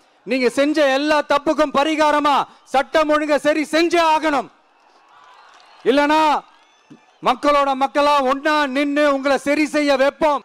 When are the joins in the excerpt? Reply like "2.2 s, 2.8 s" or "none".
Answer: none